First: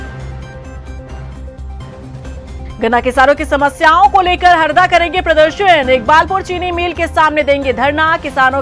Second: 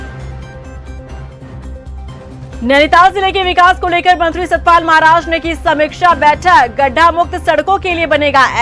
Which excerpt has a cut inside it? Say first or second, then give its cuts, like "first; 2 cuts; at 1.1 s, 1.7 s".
first; 1 cut; at 1.2 s